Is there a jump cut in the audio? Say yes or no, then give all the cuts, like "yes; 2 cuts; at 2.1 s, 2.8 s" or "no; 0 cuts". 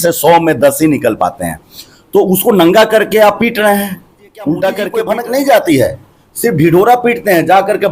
yes; 1 cut; at 4.9 s